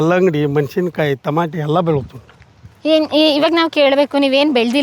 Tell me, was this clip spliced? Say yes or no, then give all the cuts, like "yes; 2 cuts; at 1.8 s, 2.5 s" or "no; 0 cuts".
no; 0 cuts